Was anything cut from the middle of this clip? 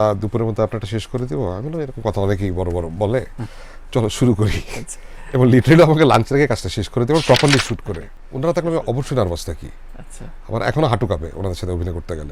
yes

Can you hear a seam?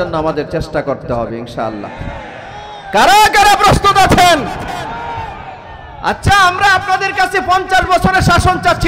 no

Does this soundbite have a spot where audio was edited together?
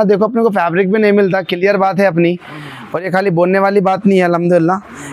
no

